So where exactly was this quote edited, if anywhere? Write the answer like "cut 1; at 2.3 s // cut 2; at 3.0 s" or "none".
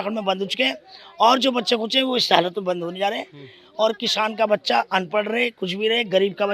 none